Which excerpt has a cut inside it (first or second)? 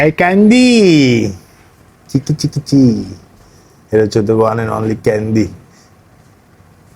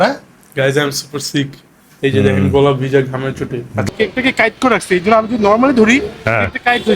second